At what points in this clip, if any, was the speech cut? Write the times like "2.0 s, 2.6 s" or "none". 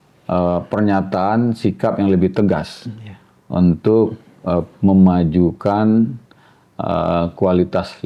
none